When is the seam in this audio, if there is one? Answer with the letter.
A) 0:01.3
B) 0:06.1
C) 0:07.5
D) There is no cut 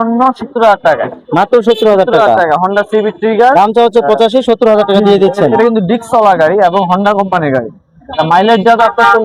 D